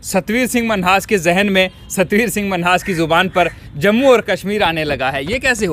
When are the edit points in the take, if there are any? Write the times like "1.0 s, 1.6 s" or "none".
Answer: none